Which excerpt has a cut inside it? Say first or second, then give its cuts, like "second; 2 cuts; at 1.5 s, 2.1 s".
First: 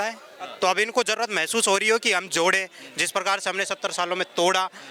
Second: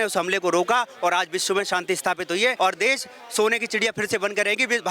second; 1 cut; at 2.5 s